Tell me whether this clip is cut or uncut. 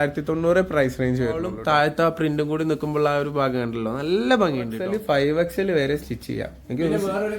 cut